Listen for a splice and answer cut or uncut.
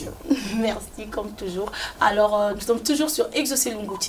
uncut